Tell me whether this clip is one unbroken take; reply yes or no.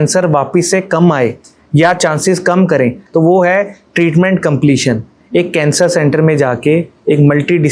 yes